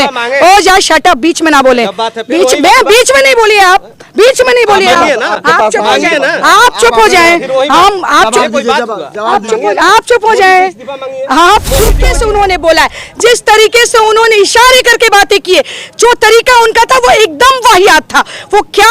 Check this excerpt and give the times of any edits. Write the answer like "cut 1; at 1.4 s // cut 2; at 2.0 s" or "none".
cut 1; at 12.1 s